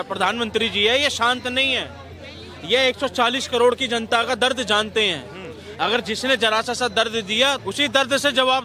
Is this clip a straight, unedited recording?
no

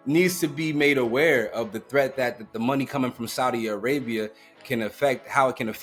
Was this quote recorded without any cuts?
yes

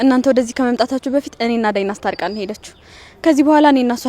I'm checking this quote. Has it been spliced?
no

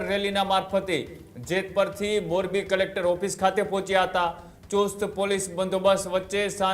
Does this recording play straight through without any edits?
yes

